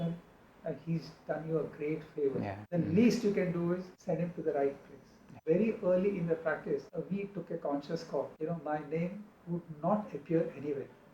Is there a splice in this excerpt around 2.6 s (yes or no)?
yes